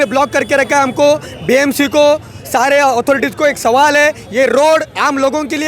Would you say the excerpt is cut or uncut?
uncut